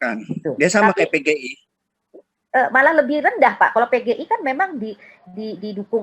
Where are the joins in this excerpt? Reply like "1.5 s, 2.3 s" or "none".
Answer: none